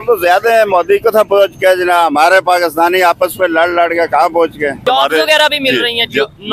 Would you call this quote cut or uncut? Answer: cut